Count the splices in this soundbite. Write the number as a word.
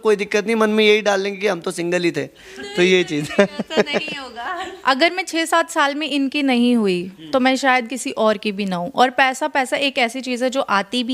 one